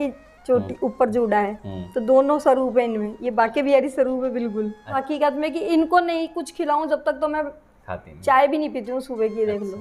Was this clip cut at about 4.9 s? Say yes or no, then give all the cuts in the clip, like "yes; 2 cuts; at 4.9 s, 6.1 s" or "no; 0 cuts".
yes; 1 cut; at 4.9 s